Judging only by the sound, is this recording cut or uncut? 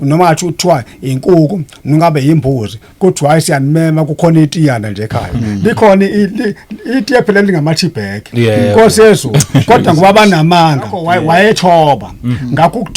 cut